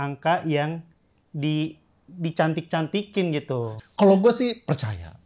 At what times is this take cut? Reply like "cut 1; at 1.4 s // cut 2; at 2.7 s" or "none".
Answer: cut 1; at 3.8 s